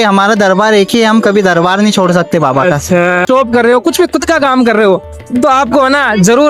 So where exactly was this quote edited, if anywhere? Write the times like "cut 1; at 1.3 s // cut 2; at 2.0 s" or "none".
cut 1; at 3.2 s